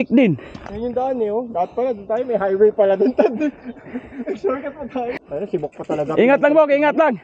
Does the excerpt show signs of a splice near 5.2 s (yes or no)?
yes